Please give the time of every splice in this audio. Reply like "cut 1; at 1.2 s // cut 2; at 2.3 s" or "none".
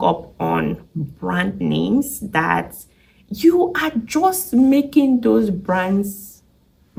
none